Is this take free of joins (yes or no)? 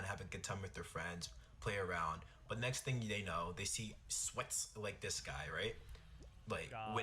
no